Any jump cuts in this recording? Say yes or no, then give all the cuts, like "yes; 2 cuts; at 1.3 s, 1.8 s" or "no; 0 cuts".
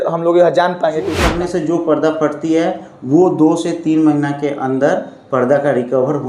yes; 1 cut; at 1.2 s